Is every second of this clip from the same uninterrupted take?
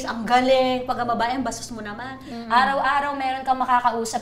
no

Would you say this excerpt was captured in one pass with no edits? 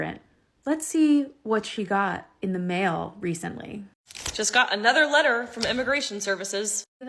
yes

